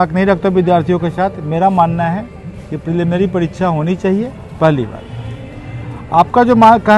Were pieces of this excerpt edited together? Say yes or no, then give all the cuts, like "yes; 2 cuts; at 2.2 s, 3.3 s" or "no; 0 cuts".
no; 0 cuts